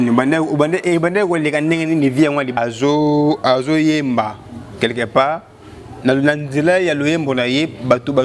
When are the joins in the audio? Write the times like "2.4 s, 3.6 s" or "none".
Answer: 2.6 s

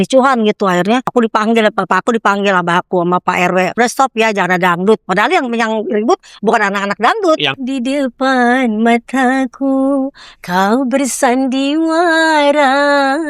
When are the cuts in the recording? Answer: 1.1 s, 3.7 s, 7.6 s

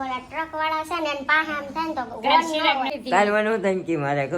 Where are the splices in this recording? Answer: 2.9 s

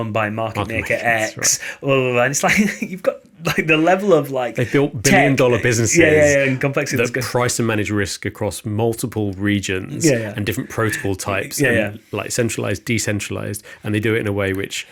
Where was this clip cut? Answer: none

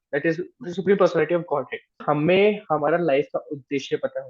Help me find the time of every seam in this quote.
2.0 s

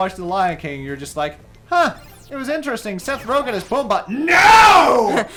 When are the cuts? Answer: none

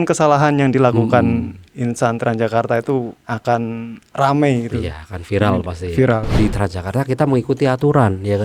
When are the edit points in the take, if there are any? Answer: 3.2 s, 6.3 s

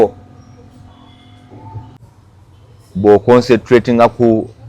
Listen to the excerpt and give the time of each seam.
2.0 s

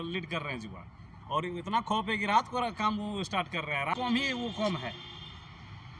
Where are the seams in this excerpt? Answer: 4.0 s

